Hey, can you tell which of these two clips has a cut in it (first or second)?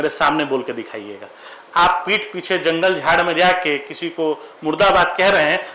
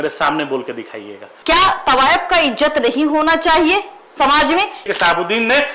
second